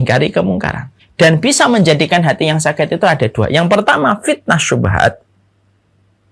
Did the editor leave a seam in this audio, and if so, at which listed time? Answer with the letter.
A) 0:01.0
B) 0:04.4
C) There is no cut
A